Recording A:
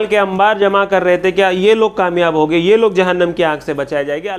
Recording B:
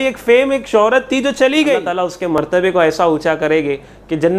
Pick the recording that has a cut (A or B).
B